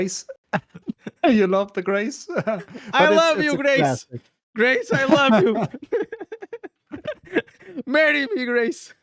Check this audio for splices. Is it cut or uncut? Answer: uncut